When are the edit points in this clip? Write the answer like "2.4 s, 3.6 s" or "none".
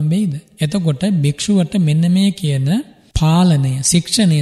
3.0 s

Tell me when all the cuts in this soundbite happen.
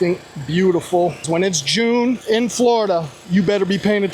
1.2 s, 2.2 s, 3.2 s

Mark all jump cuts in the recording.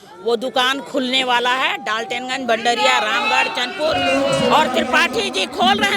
none

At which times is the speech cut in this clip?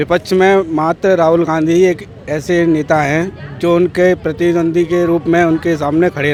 none

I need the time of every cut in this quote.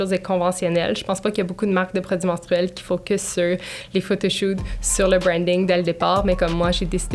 none

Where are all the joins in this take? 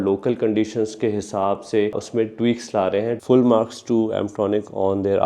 2.0 s, 3.2 s

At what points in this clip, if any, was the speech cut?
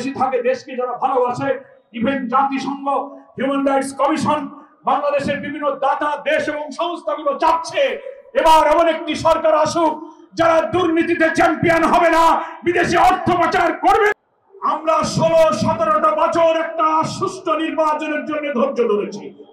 14.1 s

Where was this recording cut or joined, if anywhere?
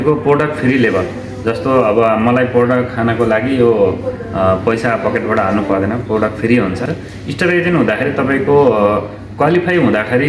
6.9 s

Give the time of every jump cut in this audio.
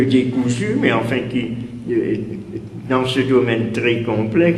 3.4 s

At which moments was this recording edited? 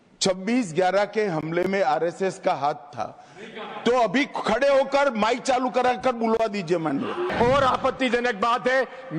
7.3 s

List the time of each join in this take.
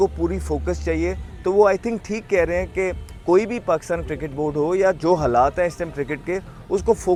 none

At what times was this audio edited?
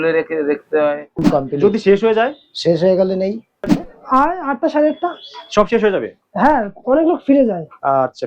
1.2 s, 3.7 s

